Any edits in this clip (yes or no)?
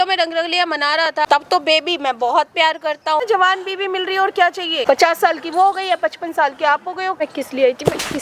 yes